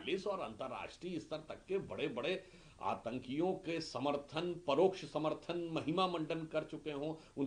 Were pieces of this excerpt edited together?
no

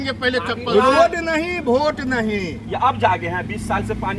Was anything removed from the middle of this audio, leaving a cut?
no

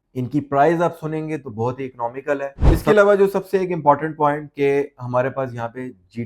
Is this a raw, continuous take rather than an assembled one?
no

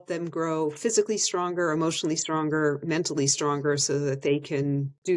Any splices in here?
no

